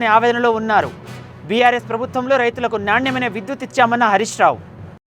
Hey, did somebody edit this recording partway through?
no; 0 cuts

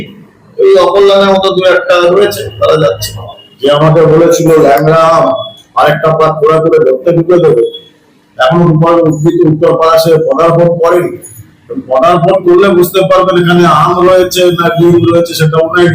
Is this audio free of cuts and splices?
no; 1 cut; at 3.4 s

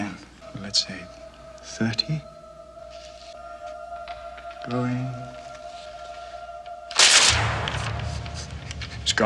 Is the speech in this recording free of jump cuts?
yes; 0 cuts

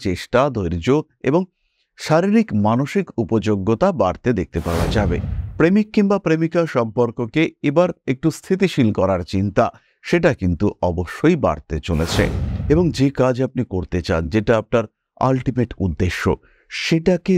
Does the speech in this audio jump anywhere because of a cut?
yes; 2 cuts; at 5.3 s, 12.5 s

